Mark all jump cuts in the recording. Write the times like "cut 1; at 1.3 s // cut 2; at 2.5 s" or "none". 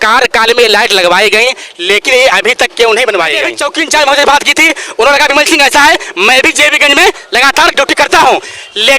cut 1; at 3.6 s